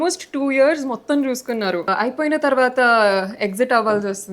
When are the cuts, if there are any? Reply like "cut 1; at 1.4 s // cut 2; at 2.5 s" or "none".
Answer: cut 1; at 1.8 s